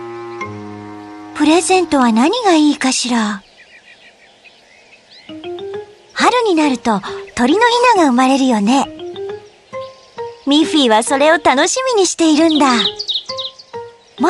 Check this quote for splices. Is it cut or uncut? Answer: uncut